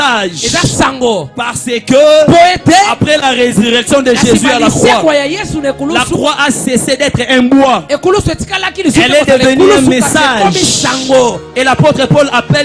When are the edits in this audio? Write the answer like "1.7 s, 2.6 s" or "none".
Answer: none